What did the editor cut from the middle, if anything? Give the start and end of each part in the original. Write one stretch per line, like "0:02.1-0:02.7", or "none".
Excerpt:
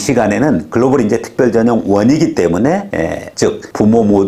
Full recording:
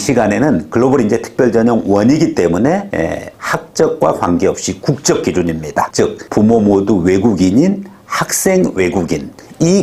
0:03.3-0:05.9